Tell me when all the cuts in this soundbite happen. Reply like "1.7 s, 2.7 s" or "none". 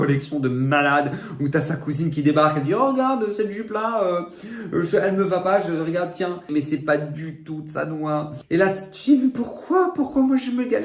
6.5 s, 8.4 s